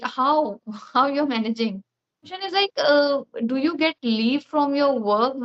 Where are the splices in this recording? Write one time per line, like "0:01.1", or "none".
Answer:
0:02.4